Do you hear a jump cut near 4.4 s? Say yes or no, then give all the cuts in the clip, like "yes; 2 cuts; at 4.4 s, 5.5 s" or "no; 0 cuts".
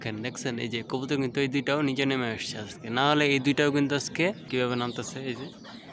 yes; 1 cut; at 4.4 s